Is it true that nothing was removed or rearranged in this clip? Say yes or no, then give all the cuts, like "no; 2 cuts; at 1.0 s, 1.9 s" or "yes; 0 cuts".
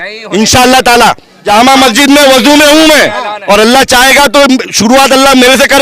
no; 1 cut; at 1.4 s